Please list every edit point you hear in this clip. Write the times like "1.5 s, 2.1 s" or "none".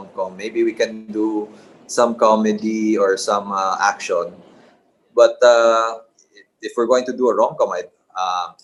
none

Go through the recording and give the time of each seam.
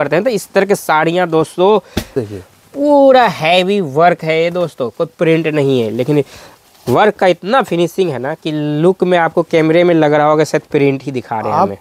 2.1 s

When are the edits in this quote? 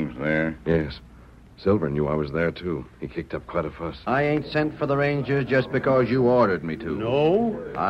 4.0 s

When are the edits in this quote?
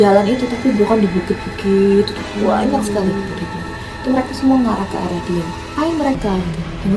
none

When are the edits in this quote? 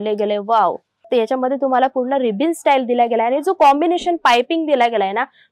1.1 s

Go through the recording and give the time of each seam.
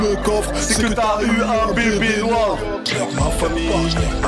none

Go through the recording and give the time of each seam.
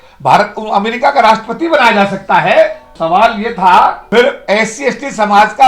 2.9 s, 4.0 s

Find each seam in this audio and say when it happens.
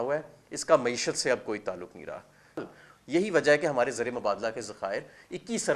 2.6 s

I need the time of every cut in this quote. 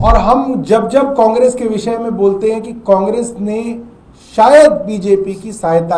none

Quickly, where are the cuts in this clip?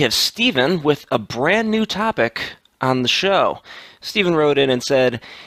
none

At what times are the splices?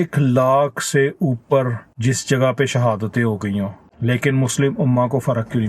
1.8 s, 3.8 s

